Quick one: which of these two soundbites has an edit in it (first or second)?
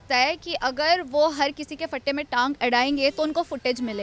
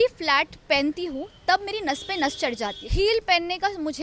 second